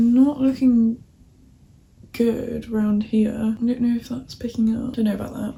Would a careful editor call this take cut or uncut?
uncut